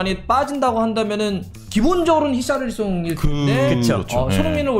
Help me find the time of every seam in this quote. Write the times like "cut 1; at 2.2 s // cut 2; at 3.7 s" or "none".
cut 1; at 1.5 s